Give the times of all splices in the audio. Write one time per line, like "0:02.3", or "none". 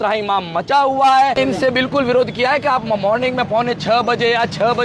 0:01.4